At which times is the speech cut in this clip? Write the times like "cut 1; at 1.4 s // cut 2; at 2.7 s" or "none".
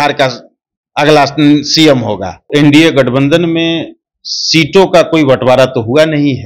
cut 1; at 2.5 s